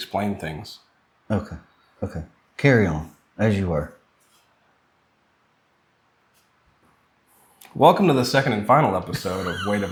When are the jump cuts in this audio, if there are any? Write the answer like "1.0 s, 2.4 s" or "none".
none